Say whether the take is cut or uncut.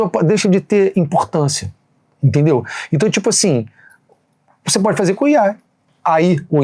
uncut